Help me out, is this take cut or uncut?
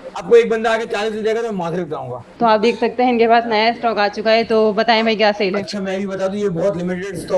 cut